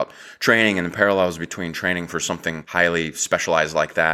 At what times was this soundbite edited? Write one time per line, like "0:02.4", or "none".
0:02.6